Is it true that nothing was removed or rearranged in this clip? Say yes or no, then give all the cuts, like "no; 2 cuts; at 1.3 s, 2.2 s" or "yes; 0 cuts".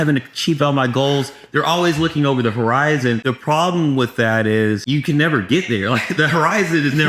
no; 2 cuts; at 3.2 s, 4.8 s